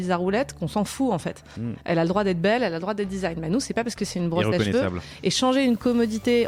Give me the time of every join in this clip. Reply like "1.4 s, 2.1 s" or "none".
none